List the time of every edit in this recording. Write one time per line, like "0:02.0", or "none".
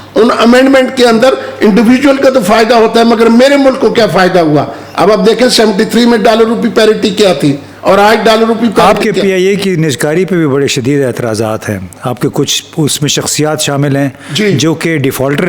none